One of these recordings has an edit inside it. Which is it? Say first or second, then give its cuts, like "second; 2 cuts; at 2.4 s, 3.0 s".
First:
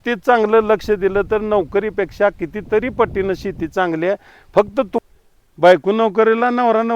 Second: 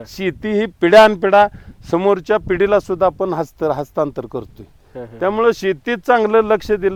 first; 1 cut; at 5.0 s